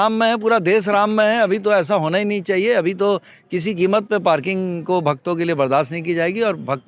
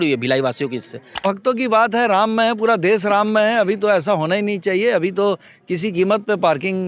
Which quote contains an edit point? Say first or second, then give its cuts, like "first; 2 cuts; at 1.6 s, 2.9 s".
second; 1 cut; at 1.2 s